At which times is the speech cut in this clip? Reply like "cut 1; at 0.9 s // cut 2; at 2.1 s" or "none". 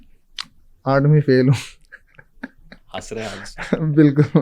none